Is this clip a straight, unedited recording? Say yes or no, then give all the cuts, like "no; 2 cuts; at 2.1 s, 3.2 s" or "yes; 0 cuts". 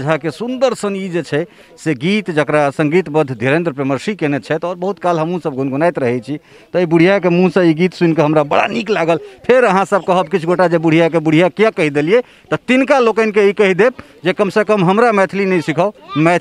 yes; 0 cuts